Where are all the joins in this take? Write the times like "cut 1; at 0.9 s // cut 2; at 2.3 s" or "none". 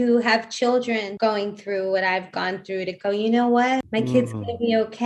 cut 1; at 1.1 s // cut 2; at 3.9 s